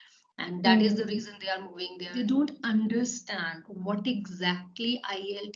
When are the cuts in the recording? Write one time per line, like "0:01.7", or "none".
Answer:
0:02.0